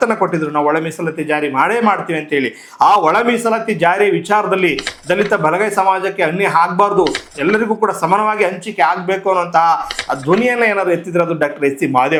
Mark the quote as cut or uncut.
uncut